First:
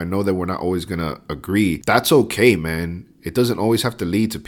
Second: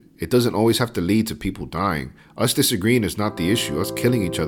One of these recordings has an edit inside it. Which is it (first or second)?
first